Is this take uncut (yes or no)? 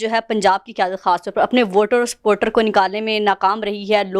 yes